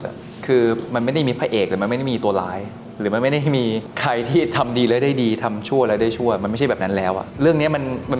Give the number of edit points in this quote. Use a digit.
2